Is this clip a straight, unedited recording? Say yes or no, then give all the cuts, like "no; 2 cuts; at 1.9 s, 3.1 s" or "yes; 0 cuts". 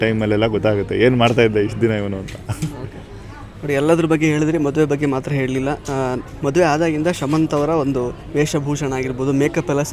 yes; 0 cuts